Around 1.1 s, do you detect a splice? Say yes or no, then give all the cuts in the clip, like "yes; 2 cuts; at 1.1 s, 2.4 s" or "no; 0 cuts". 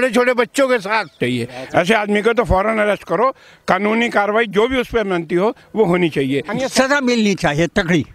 yes; 2 cuts; at 1.1 s, 6.5 s